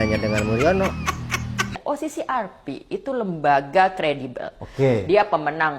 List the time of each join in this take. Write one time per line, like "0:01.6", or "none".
0:01.7